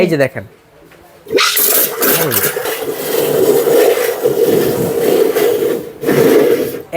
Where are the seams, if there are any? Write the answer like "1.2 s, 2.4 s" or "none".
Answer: 2.6 s